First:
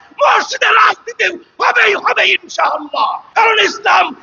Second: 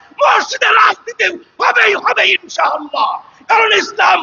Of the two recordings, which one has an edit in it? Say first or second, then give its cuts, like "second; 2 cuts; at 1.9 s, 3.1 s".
first; 1 cut; at 3.2 s